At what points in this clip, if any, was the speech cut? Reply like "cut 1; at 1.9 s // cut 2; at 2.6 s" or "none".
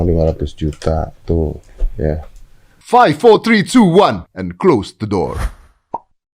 cut 1; at 2.8 s